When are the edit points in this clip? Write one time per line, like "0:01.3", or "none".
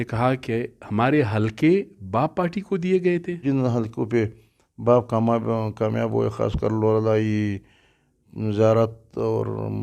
0:03.4